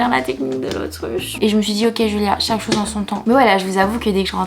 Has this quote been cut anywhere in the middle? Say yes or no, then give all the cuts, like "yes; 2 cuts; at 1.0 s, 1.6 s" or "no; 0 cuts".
yes; 2 cuts; at 1.3 s, 3.2 s